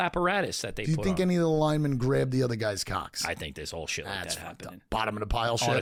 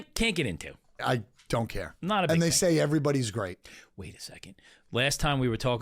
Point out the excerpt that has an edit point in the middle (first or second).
second